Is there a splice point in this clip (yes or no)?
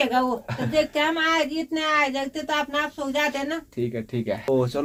no